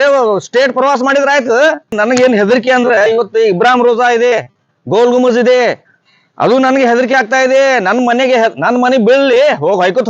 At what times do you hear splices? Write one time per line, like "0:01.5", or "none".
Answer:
0:01.9